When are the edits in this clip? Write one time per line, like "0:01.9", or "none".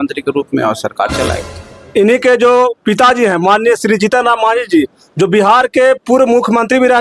0:01.7